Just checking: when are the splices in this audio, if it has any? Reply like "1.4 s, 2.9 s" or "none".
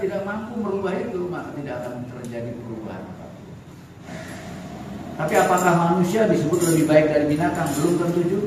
4.0 s